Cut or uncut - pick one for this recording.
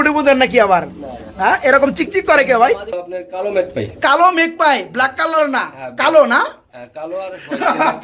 cut